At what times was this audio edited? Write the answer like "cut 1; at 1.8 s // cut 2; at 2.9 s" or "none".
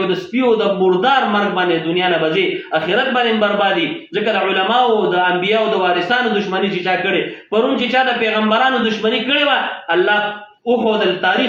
none